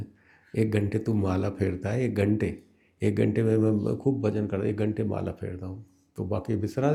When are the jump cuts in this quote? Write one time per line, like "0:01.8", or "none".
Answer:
none